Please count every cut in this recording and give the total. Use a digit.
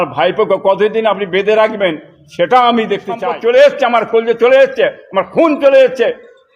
1